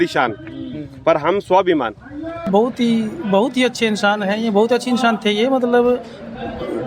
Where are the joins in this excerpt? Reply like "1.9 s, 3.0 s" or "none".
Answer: 2.5 s